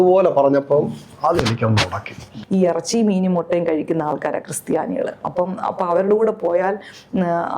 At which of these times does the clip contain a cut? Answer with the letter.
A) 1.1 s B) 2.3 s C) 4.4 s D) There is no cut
B